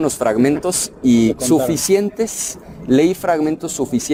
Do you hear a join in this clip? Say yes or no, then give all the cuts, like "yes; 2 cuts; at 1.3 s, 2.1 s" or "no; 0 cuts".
no; 0 cuts